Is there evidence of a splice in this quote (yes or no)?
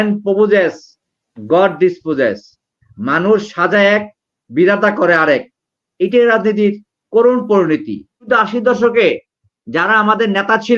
yes